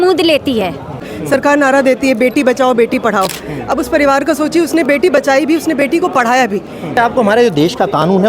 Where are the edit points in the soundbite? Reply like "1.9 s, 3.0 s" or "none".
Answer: 1.1 s, 6.9 s